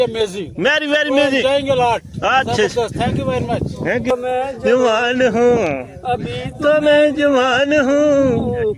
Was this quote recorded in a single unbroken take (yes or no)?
no